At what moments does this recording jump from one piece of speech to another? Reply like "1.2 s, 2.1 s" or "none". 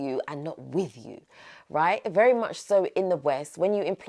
none